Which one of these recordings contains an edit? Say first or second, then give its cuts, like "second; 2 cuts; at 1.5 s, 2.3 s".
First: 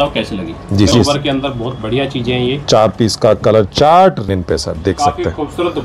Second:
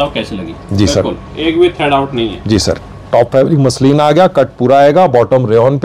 first; 2 cuts; at 0.9 s, 4.3 s